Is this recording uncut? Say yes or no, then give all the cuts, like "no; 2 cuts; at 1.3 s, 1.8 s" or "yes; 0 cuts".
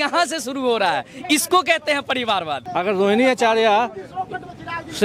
no; 1 cut; at 2.6 s